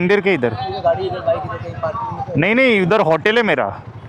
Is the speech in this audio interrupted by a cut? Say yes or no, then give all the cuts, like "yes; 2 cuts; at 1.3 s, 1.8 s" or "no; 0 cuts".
no; 0 cuts